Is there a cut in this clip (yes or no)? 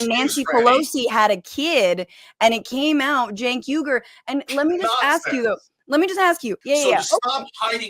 yes